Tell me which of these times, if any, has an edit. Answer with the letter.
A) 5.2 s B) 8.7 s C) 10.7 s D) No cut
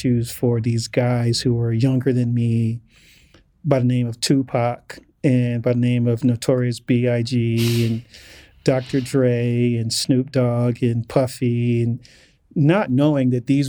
D